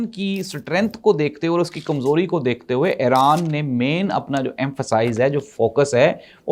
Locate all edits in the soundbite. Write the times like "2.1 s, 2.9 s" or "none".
none